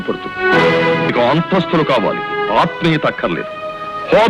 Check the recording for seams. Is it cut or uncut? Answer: cut